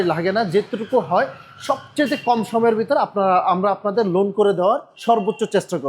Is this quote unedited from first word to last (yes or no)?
no